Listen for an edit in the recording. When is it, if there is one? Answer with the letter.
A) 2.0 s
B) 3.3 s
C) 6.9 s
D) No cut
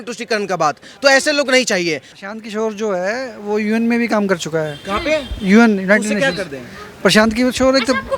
A